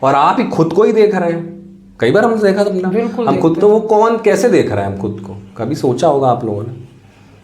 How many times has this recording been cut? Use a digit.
0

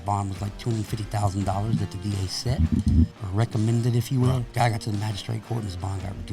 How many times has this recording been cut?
2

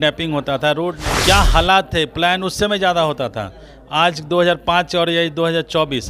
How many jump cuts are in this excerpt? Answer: 1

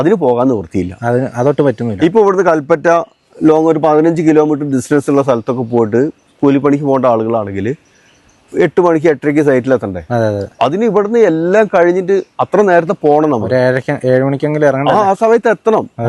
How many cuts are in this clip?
0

